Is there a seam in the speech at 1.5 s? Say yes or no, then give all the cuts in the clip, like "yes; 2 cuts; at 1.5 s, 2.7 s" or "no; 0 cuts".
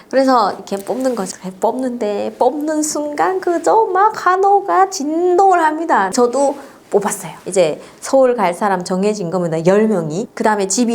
no; 2 cuts; at 6.1 s, 7.4 s